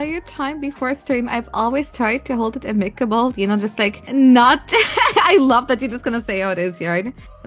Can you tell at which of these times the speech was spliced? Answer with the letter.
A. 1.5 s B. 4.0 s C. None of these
B